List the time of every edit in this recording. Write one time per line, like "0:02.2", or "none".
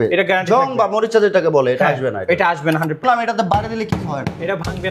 0:03.0

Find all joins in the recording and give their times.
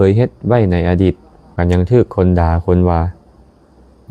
0:01.6

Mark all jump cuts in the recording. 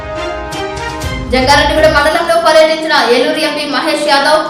none

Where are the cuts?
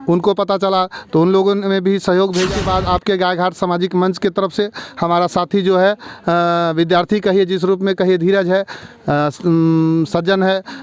0:02.6

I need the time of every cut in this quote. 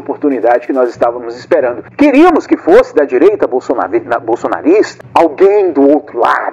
0:05.0

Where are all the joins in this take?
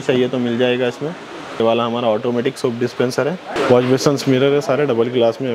0:01.6
0:03.6

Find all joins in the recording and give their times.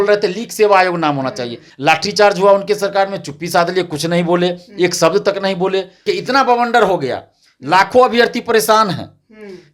0:01.6
0:06.1

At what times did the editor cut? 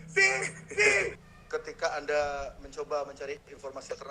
0:01.2

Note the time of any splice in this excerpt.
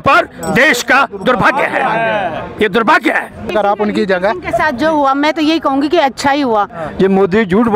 0:03.5
0:06.8

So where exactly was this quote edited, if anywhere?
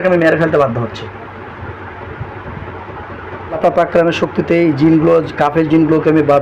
0:03.6

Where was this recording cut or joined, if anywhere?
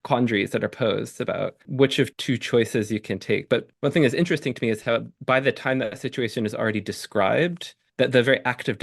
0:01.6

